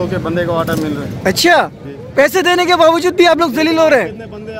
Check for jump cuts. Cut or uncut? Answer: uncut